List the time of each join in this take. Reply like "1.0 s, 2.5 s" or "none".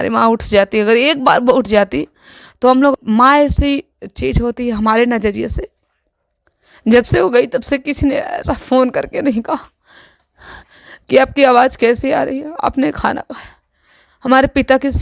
2.9 s

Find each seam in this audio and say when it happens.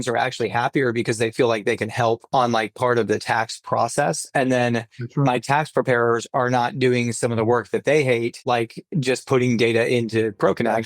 2.2 s, 8.4 s

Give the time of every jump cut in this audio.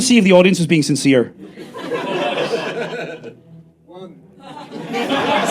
none

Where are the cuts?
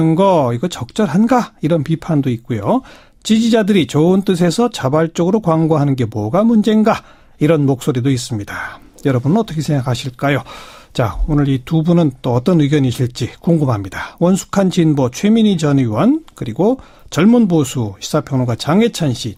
none

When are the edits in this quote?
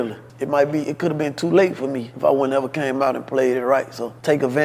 none

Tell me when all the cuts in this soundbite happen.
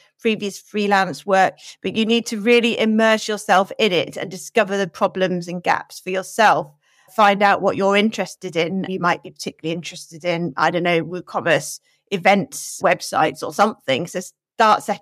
7.1 s, 8.9 s, 12.8 s

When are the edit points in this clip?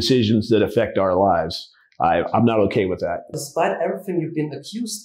3.4 s

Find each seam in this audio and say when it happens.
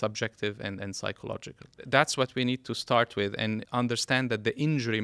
1.8 s, 3.6 s

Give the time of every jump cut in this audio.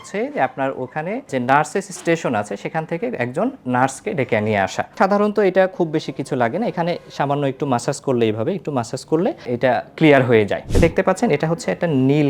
1.3 s, 4.9 s, 9.4 s, 10.7 s

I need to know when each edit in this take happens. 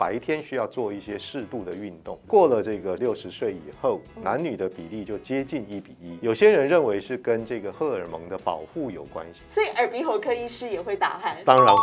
2.3 s, 3.0 s, 6.0 s, 9.4 s

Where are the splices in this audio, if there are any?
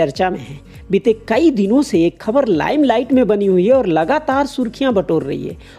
none

